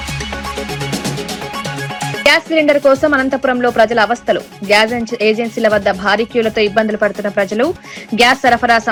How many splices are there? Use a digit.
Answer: 0